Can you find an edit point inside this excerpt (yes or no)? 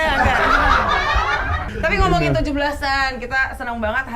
yes